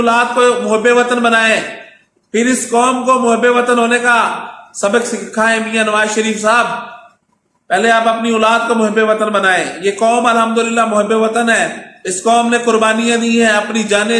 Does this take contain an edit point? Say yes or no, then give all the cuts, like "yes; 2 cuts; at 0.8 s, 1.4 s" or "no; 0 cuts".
no; 0 cuts